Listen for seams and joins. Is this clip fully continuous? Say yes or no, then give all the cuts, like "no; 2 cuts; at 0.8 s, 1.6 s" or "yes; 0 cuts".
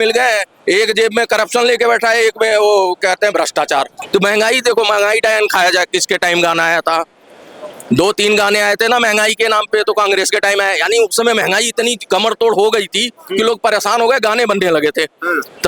no; 1 cut; at 4.0 s